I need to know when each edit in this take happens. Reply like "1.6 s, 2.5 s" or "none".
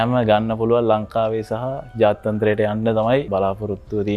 3.3 s